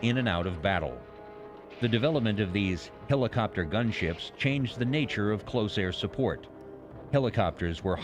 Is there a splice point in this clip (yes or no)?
yes